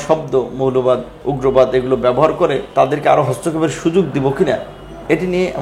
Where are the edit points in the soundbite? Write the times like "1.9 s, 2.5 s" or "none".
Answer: 1.1 s, 2.6 s